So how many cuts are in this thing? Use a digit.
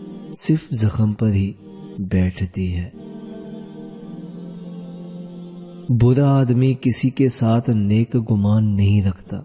2